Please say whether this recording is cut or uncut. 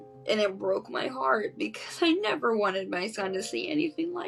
uncut